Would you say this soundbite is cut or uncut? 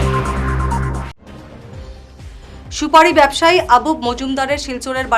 cut